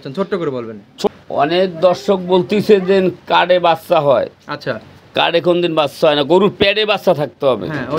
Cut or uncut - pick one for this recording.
cut